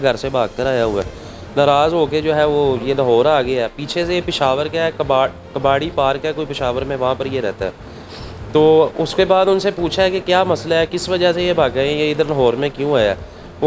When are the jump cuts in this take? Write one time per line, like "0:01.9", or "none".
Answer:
none